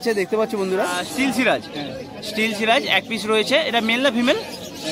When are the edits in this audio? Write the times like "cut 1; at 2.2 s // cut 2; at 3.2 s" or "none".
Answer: cut 1; at 1.0 s